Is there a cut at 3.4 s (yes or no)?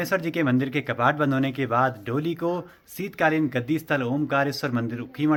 no